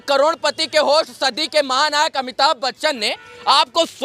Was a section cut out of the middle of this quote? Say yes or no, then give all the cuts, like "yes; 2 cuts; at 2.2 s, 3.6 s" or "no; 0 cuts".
no; 0 cuts